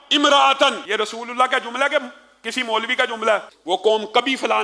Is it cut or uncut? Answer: cut